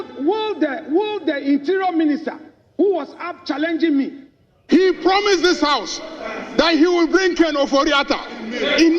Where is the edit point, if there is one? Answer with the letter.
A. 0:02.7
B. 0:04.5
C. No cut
B